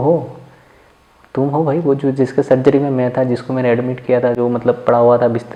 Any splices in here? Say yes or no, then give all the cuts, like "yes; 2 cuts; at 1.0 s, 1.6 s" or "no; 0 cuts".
no; 0 cuts